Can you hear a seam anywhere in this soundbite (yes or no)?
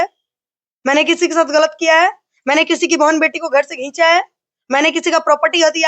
no